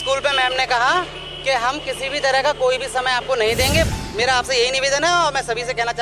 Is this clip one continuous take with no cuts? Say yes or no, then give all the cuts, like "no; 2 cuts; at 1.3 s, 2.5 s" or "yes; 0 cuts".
no; 1 cut; at 3.9 s